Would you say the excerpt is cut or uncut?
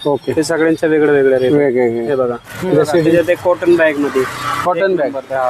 cut